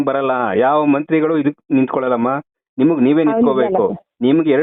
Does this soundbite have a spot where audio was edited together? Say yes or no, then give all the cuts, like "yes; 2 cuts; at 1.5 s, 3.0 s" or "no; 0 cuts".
no; 0 cuts